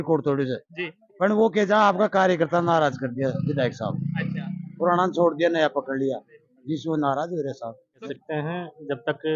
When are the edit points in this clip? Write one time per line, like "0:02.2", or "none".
0:08.0